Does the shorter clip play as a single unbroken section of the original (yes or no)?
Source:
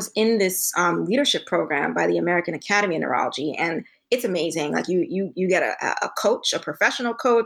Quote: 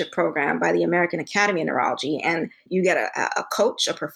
no